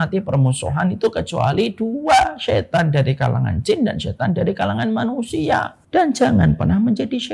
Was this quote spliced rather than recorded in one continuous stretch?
yes; 1 cut; at 5.8 s

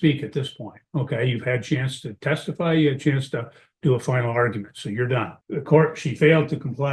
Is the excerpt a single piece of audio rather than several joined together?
yes; 0 cuts

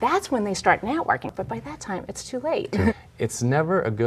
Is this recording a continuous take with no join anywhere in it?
no; 2 cuts; at 1.3 s, 2.9 s

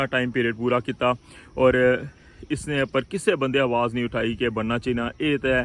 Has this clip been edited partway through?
no; 0 cuts

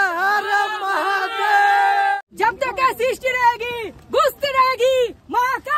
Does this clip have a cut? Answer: yes; 1 cut; at 2.2 s

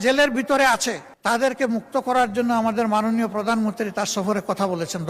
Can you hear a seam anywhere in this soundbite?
yes; 1 cut; at 1.1 s

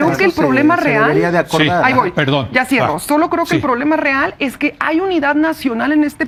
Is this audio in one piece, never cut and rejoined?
yes; 0 cuts

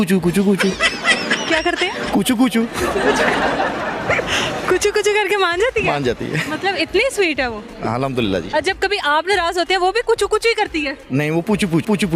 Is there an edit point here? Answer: no; 0 cuts

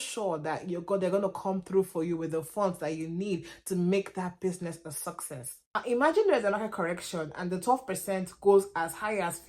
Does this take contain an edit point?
yes; 1 cut; at 5.7 s

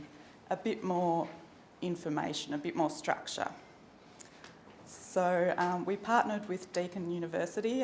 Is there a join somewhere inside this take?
no; 0 cuts

